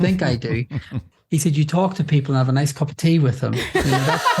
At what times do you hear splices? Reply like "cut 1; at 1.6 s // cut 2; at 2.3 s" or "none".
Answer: cut 1; at 1.0 s